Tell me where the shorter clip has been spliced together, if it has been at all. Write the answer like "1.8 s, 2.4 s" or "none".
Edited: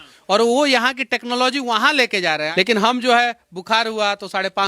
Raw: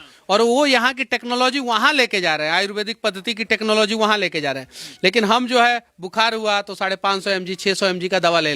2.5 s